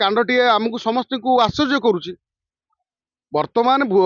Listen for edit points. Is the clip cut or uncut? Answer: uncut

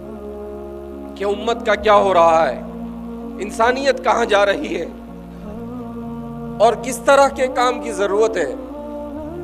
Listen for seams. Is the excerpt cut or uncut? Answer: cut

